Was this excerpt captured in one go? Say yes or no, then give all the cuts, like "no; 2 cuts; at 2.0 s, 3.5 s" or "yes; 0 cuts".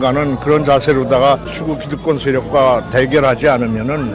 no; 1 cut; at 1.5 s